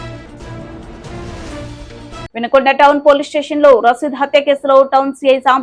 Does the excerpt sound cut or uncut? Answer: cut